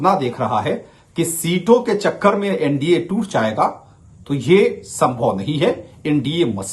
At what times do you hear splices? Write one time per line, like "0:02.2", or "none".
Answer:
none